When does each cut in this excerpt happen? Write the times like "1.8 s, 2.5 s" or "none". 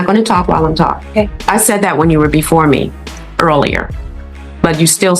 1.0 s